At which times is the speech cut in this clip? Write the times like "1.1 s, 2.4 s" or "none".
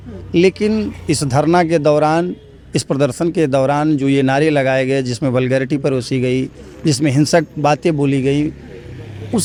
none